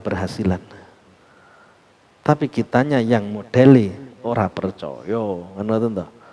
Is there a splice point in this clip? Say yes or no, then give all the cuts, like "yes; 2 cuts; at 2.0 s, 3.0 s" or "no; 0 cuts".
no; 0 cuts